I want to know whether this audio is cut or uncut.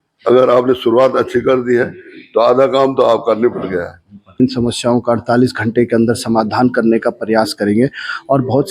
cut